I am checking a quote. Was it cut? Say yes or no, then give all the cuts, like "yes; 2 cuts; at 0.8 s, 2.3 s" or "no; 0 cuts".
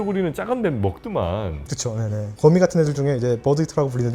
yes; 1 cut; at 2.3 s